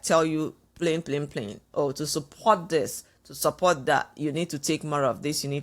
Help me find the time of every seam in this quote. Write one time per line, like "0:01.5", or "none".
none